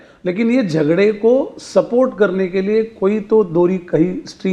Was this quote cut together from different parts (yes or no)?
no